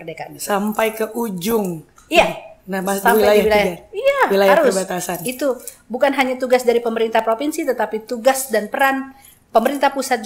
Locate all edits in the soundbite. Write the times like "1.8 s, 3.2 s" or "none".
none